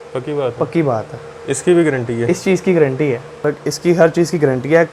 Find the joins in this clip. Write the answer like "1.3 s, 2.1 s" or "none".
3.5 s